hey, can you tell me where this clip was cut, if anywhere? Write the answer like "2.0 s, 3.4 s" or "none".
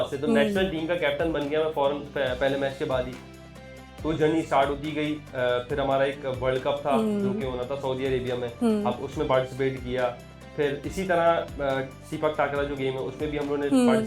none